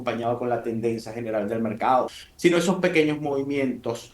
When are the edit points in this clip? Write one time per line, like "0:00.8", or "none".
0:02.1